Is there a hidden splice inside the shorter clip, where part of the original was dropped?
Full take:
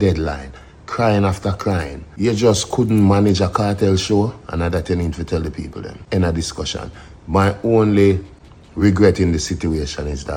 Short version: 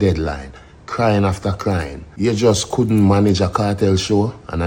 no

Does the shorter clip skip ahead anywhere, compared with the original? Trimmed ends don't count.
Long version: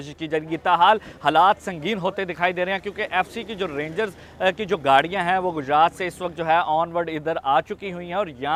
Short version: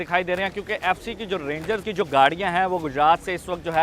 yes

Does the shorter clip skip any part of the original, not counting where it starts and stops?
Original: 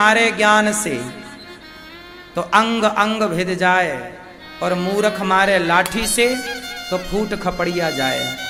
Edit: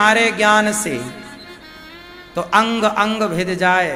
no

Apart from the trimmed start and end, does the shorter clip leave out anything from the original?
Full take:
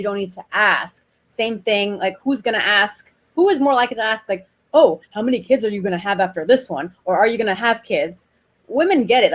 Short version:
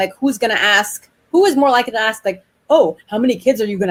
no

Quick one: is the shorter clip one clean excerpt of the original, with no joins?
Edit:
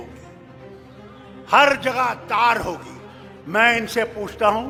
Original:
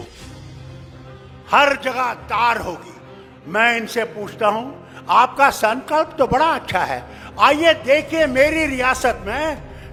yes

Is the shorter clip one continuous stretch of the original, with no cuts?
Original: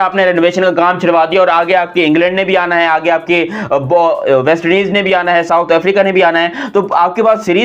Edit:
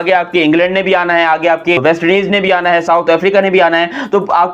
no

